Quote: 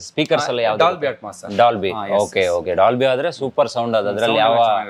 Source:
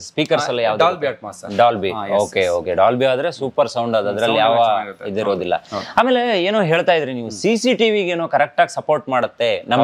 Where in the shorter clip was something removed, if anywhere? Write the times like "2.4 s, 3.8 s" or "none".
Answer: none